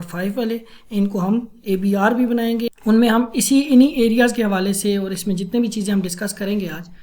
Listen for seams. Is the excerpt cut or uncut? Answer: cut